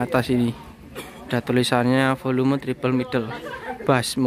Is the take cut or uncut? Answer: uncut